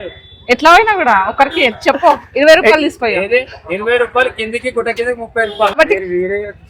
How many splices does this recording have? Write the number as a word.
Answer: one